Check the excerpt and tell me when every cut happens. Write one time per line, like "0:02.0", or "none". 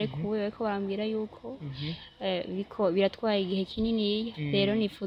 none